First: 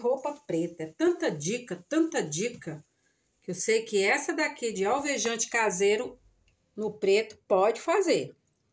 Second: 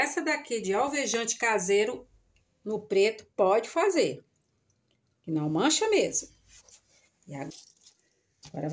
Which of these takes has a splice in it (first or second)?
second